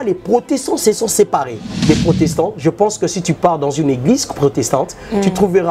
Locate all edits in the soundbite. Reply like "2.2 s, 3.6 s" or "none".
1.7 s